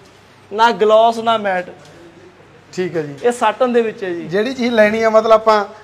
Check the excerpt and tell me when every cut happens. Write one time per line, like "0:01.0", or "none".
none